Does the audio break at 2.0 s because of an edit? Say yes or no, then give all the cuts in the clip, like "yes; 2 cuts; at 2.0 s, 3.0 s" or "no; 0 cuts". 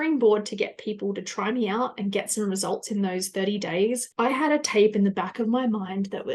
no; 1 cut; at 4.1 s